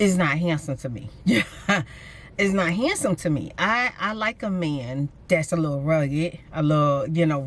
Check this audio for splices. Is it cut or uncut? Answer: uncut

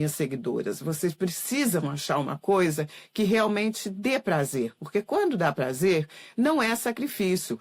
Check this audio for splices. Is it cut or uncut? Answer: uncut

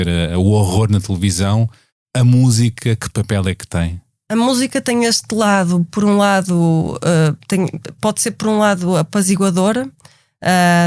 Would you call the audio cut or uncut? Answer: cut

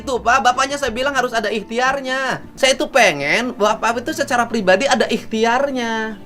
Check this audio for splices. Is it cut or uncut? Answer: cut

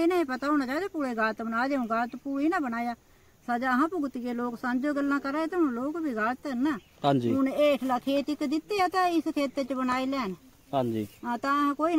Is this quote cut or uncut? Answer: uncut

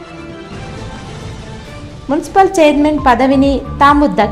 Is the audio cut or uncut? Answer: cut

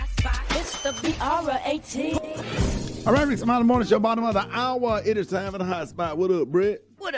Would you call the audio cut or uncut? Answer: cut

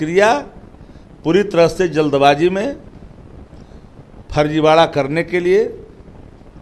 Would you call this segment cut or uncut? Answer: uncut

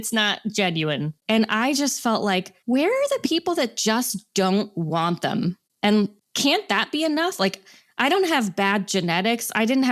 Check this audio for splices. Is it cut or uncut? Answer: cut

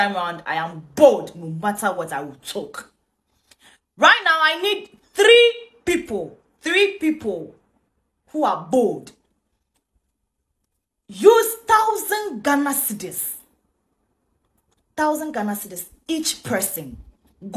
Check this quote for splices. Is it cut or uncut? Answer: uncut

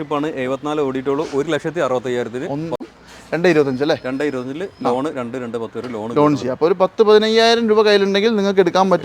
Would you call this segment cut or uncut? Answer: cut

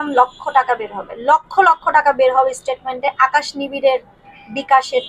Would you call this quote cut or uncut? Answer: uncut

